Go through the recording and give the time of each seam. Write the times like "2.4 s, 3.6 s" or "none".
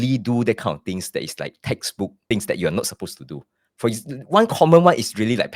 2.2 s